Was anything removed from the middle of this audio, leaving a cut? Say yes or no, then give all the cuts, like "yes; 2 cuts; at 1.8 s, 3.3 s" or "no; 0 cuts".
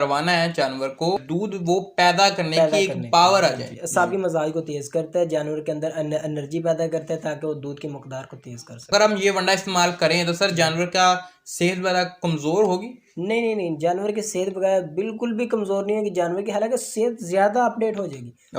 yes; 3 cuts; at 1.2 s, 3.7 s, 8.9 s